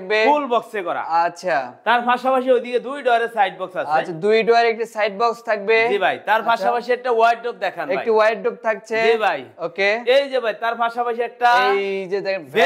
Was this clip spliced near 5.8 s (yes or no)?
no